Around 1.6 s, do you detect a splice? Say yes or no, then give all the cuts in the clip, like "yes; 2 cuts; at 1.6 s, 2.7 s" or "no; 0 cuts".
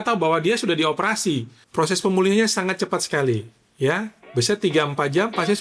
yes; 1 cut; at 1.6 s